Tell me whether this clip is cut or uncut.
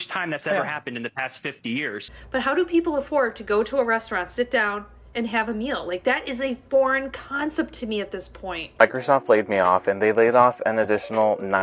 cut